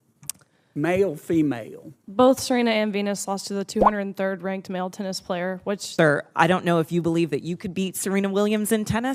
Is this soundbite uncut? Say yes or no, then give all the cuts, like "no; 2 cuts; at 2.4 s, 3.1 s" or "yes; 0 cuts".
no; 1 cut; at 5.8 s